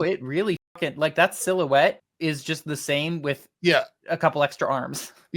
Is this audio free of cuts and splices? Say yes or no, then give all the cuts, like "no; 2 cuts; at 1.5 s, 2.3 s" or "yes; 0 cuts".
no; 1 cut; at 2.1 s